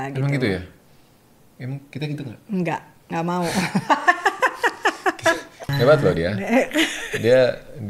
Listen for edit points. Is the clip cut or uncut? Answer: cut